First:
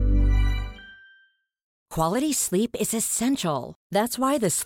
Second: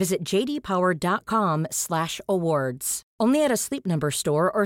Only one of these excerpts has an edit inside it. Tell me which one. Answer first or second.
first